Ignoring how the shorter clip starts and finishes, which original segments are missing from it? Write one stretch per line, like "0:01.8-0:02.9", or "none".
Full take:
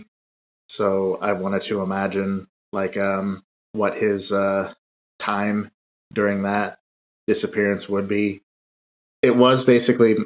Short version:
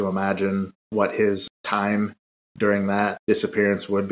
0:02.8-0:04.6
0:06.7-0:07.2